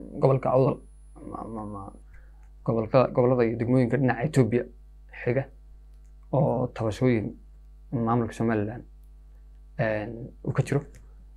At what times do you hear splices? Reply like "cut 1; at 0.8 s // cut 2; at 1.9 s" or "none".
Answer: none